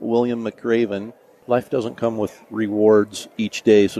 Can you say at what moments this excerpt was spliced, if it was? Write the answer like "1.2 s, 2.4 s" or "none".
1.3 s